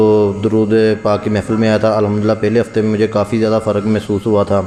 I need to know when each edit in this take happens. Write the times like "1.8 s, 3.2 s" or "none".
none

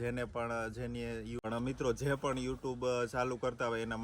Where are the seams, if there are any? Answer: 1.4 s

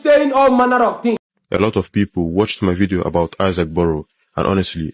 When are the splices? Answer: 1.3 s

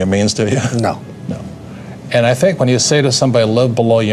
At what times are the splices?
none

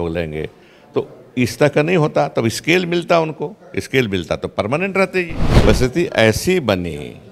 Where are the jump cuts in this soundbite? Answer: 5.4 s

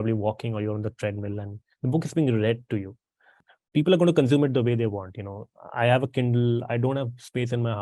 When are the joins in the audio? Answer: 3.2 s

